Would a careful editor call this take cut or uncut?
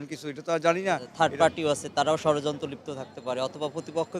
cut